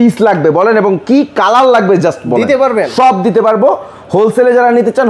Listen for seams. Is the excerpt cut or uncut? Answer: uncut